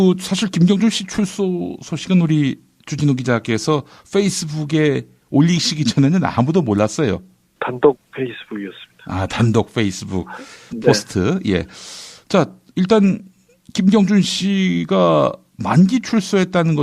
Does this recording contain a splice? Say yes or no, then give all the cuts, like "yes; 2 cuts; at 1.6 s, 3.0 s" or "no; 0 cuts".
yes; 1 cut; at 3.6 s